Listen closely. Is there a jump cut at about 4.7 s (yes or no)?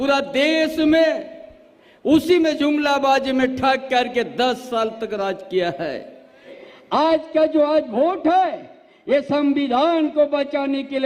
no